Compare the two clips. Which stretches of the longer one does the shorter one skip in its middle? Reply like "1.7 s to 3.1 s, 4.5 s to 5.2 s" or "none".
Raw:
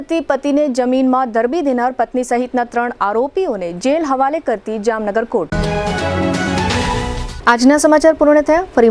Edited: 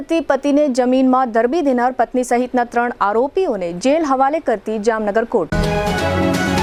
none